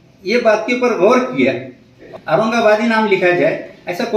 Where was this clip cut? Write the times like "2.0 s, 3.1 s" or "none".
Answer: 2.0 s